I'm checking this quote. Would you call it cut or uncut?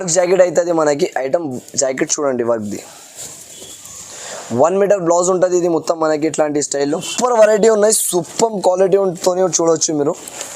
cut